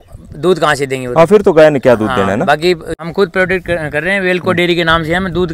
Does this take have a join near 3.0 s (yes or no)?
yes